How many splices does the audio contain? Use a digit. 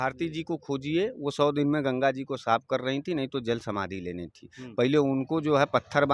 0